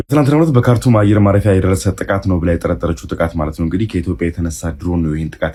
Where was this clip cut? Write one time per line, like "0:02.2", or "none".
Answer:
none